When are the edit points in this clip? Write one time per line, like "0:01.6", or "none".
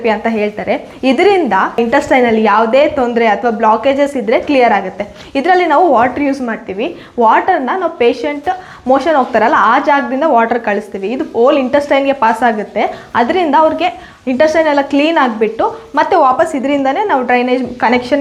none